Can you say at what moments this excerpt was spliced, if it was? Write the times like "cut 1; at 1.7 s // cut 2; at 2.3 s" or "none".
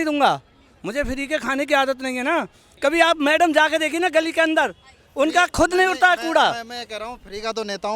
cut 1; at 2.7 s